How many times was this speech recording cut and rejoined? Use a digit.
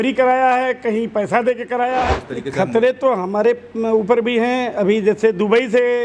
1